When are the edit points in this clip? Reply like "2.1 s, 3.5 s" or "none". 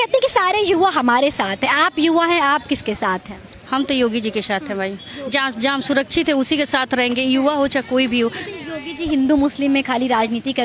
none